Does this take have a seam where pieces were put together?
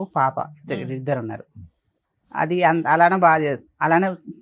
no; 0 cuts

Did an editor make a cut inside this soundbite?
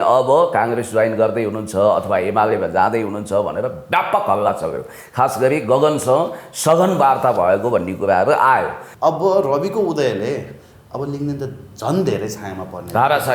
yes; 1 cut; at 8.8 s

